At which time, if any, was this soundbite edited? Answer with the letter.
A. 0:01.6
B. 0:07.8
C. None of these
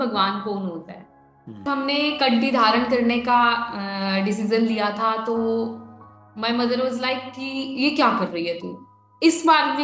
A